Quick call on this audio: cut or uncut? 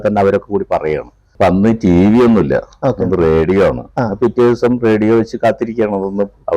cut